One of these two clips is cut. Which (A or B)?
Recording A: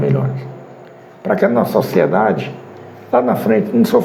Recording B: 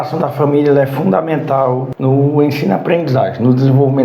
B